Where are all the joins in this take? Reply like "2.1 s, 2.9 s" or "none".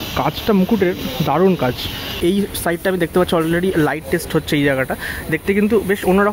2.1 s